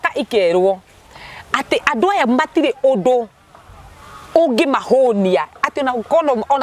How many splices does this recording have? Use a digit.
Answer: 0